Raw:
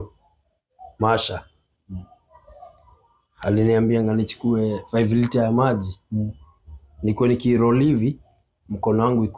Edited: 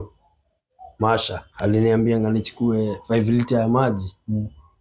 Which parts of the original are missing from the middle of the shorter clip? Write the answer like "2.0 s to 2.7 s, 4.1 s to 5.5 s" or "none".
1.5 s to 3.3 s